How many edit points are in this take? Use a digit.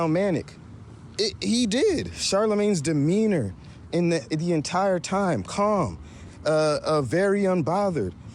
1